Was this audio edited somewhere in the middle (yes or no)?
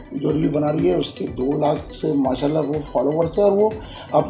no